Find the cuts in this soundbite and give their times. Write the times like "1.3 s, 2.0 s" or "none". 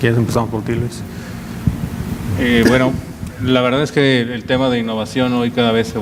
none